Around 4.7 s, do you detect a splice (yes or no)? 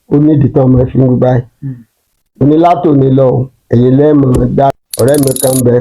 yes